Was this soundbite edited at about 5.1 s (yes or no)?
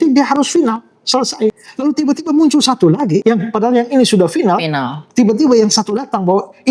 no